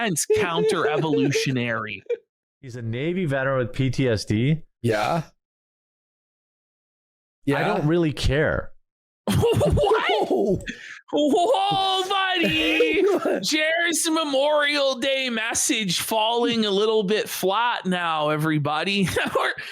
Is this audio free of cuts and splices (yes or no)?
no